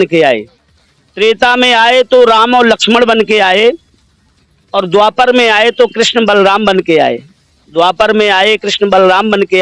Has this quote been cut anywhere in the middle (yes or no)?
no